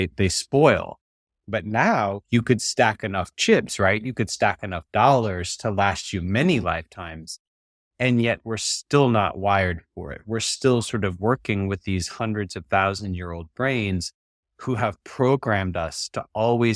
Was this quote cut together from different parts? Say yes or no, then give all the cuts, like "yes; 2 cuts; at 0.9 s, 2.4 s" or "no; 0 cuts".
no; 0 cuts